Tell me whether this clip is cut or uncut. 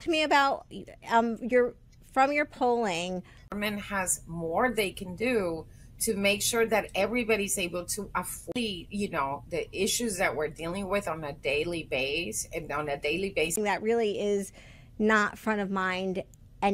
uncut